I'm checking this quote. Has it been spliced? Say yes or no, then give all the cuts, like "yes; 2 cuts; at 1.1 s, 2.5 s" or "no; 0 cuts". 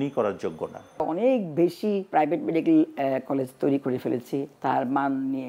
yes; 3 cuts; at 1.0 s, 2.1 s, 4.5 s